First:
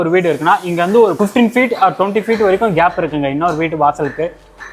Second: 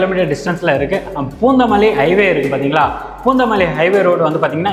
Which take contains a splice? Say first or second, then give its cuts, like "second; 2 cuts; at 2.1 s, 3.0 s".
first; 1 cut; at 1.1 s